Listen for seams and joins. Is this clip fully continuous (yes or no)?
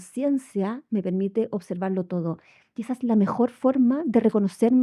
yes